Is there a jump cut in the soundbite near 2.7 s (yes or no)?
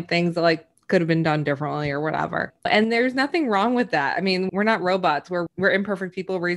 yes